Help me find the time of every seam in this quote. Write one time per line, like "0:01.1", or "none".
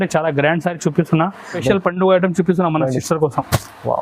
0:01.6